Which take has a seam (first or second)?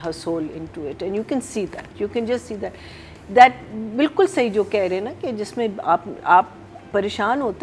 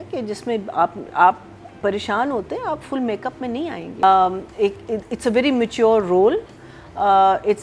second